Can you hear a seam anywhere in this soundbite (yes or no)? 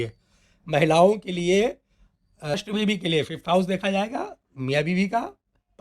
yes